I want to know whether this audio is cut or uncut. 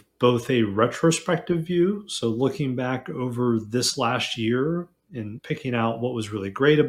cut